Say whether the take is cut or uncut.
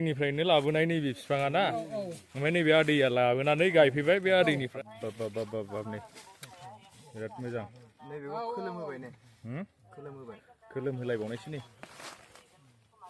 cut